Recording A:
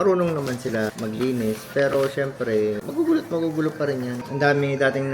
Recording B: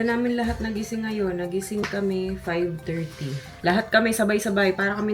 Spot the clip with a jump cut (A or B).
A